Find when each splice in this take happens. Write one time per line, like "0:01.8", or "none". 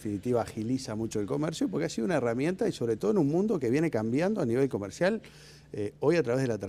0:03.2